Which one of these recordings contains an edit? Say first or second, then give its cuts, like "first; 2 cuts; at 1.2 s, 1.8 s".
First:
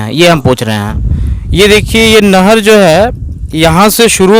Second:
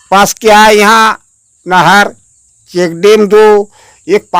first; 1 cut; at 0.9 s